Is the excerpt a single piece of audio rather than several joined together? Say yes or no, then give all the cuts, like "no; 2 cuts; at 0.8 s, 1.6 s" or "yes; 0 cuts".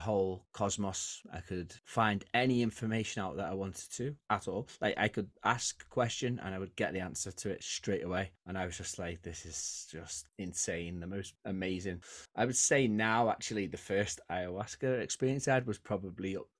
yes; 0 cuts